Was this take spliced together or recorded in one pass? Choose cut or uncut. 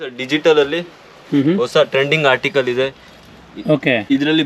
uncut